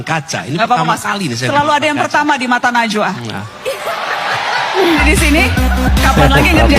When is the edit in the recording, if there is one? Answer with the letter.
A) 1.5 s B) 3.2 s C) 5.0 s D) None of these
C